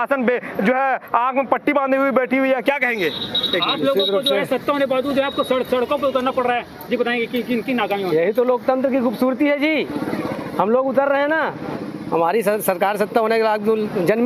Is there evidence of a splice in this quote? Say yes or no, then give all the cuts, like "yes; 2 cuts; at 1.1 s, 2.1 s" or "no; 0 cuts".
no; 0 cuts